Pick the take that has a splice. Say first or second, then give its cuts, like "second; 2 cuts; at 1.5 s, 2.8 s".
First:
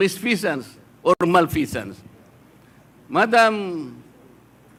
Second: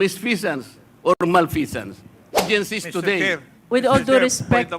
second; 1 cut; at 2.4 s